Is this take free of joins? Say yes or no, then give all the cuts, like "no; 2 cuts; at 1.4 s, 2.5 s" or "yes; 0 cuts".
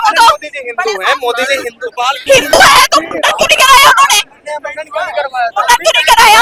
yes; 0 cuts